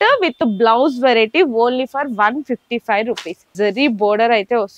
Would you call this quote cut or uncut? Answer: cut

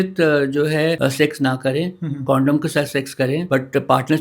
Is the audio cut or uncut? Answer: cut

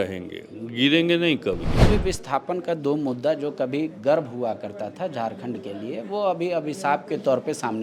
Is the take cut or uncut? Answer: cut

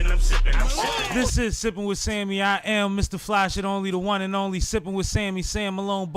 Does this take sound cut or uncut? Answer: cut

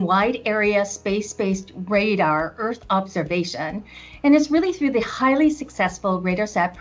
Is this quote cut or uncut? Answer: uncut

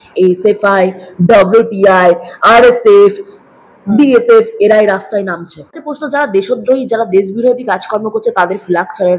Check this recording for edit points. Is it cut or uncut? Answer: cut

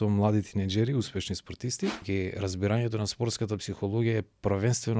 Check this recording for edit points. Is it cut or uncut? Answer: cut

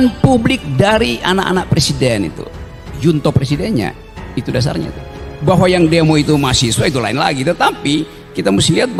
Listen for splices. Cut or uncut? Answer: uncut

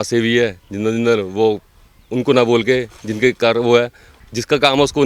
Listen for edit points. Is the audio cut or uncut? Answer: cut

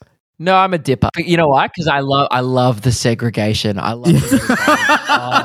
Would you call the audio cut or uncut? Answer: cut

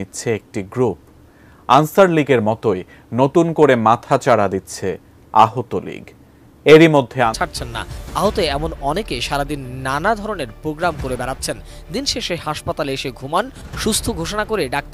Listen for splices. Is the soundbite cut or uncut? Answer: cut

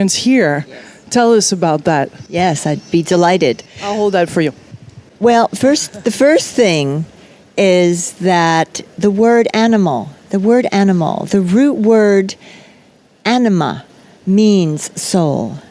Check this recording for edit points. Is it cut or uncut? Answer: uncut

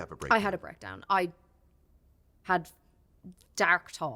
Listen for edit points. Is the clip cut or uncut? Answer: cut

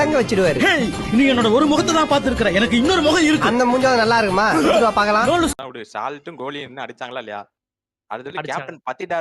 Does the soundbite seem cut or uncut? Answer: cut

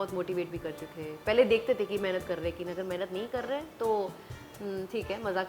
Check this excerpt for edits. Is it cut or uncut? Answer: uncut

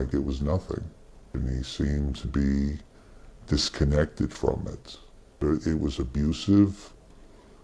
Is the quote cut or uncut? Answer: uncut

